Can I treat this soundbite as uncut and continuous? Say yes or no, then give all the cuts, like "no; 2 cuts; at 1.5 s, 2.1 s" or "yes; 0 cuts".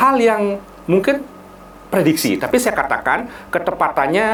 yes; 0 cuts